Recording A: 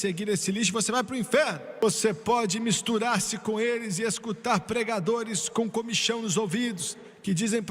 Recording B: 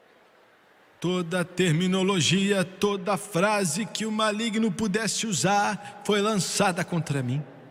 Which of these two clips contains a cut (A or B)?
A